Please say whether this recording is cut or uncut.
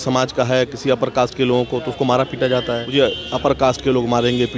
cut